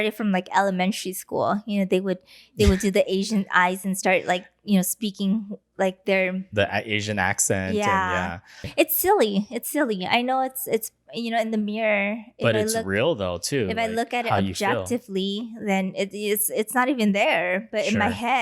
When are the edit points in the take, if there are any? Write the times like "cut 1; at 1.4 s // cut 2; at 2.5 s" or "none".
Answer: cut 1; at 8.6 s